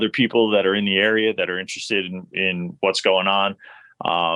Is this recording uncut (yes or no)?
yes